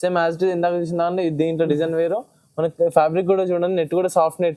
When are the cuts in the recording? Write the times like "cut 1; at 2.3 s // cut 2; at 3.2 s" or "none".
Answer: none

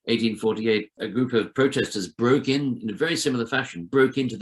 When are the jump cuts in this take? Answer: cut 1; at 1.0 s

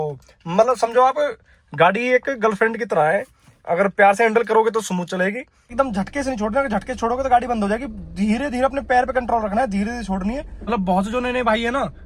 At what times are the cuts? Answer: cut 1; at 5.6 s // cut 2; at 10.6 s

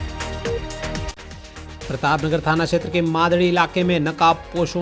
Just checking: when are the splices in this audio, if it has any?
cut 1; at 1.1 s

